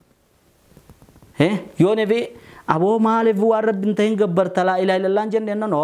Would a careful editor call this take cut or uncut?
uncut